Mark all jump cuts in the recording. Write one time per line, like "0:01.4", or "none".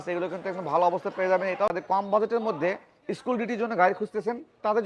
0:01.7